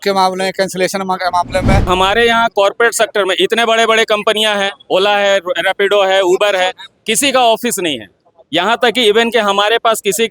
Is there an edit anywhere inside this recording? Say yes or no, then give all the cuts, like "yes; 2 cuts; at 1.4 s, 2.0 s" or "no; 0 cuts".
yes; 1 cut; at 1.9 s